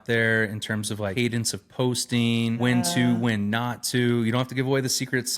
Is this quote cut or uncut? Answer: cut